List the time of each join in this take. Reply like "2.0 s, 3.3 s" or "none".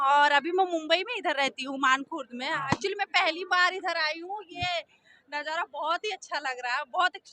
none